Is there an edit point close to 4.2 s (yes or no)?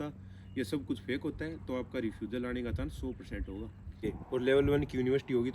yes